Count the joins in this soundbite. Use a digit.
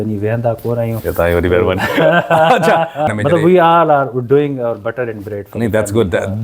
1